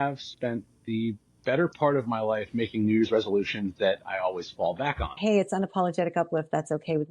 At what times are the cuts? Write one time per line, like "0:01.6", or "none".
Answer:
0:05.2